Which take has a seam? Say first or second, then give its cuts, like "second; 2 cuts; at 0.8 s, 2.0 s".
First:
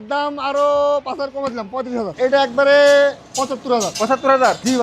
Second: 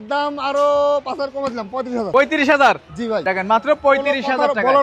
first; 1 cut; at 2.1 s